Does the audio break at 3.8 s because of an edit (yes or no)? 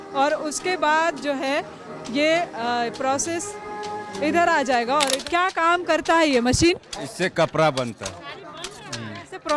no